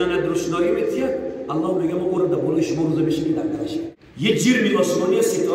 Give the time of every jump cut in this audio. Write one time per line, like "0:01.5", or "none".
0:04.0